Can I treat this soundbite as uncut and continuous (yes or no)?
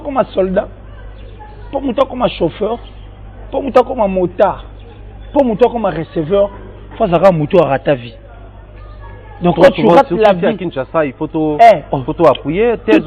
yes